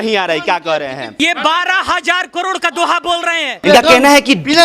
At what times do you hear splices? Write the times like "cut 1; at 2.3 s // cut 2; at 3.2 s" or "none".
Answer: cut 1; at 1.1 s // cut 2; at 3.6 s